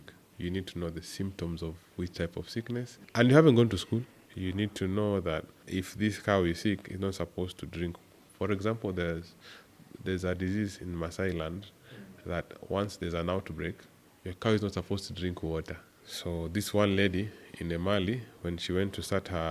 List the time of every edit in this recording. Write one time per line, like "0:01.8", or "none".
none